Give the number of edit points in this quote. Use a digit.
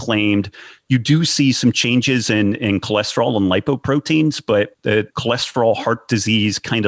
1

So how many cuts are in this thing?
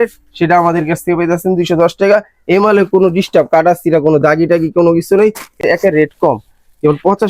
1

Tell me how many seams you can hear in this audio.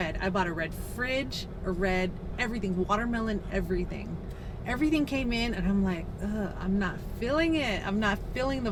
0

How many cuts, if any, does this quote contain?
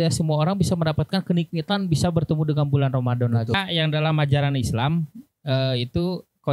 1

